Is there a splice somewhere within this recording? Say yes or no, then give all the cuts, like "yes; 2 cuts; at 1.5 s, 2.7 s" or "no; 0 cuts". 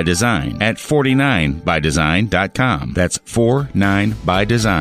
no; 0 cuts